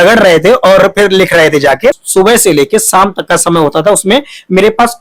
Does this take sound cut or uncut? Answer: cut